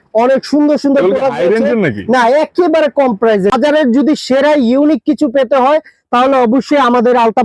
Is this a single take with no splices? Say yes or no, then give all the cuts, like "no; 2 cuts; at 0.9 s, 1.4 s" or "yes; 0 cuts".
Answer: no; 1 cut; at 3.5 s